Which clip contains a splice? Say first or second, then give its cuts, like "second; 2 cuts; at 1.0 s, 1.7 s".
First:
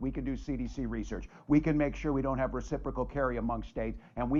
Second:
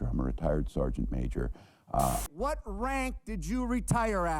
second; 1 cut; at 2.2 s